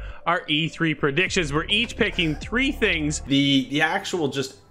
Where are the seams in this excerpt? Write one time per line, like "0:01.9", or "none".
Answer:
0:03.2